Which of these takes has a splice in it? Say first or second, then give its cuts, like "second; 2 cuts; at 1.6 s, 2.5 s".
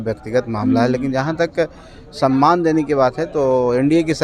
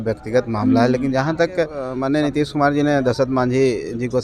second; 1 cut; at 1.9 s